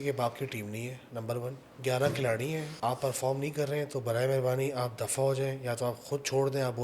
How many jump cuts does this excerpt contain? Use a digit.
2